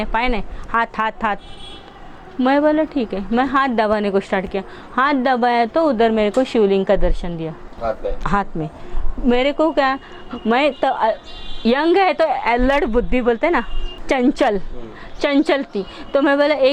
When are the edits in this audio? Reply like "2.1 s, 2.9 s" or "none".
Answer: 7.7 s